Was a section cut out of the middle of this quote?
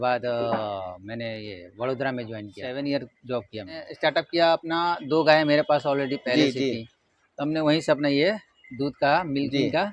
yes; 2 cuts; at 2.6 s, 3.9 s

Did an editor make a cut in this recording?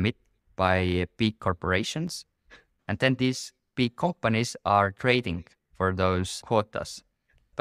yes; 1 cut; at 2.6 s

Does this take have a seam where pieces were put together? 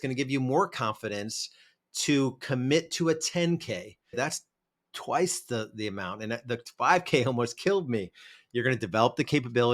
yes; 1 cut; at 4.2 s

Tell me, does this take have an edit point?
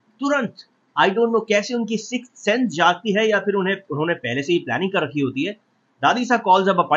no; 0 cuts

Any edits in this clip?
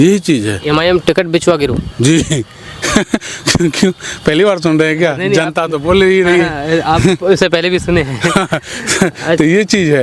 no; 0 cuts

